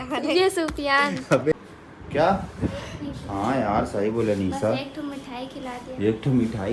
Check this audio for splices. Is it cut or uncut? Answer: cut